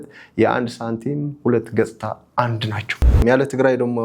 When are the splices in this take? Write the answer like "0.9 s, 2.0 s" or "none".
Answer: 3.2 s